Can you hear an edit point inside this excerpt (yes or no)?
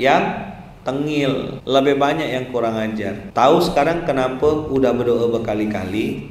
no